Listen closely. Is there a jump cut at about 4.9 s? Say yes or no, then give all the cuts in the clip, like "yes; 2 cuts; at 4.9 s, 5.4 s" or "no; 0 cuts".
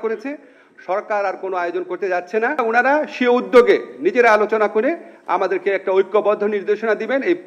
no; 1 cut; at 2.6 s